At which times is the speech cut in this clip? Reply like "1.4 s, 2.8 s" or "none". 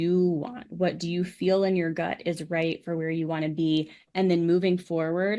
none